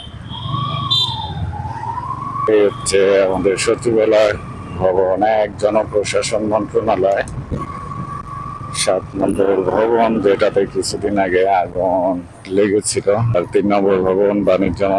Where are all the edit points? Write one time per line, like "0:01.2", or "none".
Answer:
0:02.5
0:07.5
0:13.3